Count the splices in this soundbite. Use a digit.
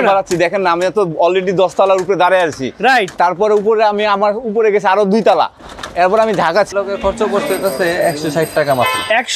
1